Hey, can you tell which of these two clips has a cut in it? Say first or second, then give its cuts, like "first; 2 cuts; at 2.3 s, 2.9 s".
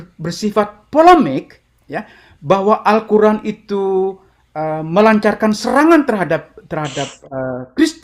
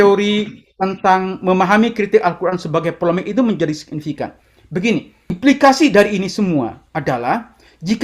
second; 1 cut; at 5.3 s